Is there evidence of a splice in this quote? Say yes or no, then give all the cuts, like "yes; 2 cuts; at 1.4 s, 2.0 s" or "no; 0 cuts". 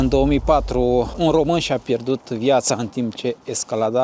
yes; 1 cut; at 1.1 s